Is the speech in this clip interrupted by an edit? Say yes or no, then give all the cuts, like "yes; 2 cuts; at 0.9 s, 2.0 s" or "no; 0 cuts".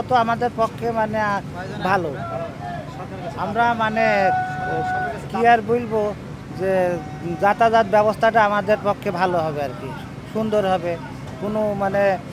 no; 0 cuts